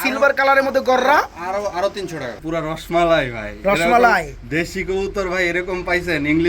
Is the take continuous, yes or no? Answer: no